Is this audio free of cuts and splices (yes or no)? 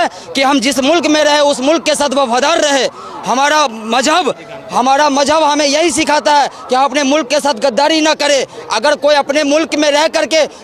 yes